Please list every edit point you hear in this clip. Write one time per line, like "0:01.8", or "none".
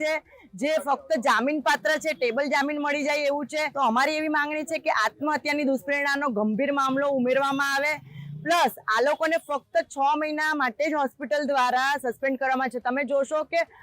0:03.7